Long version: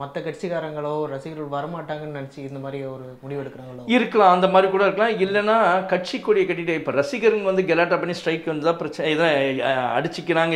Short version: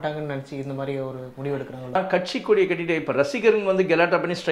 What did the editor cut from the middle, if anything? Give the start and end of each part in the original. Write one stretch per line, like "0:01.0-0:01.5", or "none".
0:03.8-0:05.7